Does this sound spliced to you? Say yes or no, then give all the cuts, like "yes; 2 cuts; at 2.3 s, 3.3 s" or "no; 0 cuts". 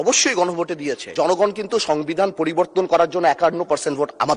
yes; 1 cut; at 1.0 s